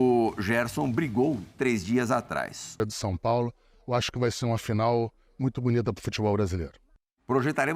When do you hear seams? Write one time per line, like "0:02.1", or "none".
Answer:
0:02.8